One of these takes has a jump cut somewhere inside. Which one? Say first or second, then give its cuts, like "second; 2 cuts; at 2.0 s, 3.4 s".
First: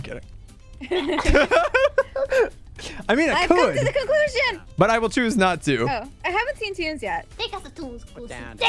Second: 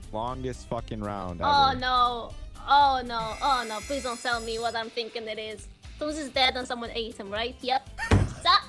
first; 2 cuts; at 6.1 s, 7.3 s